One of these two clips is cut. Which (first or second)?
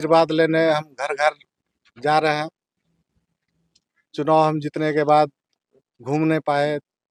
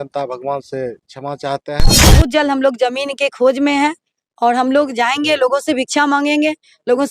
second